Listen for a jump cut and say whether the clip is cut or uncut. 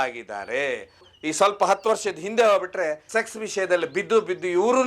uncut